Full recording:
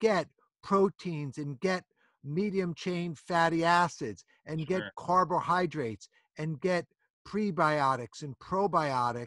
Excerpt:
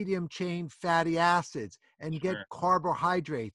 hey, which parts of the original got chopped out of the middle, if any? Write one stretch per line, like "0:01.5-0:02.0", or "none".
none